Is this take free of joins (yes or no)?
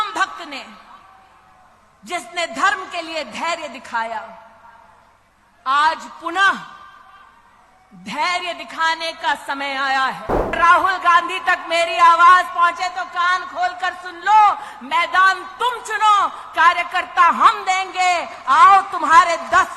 no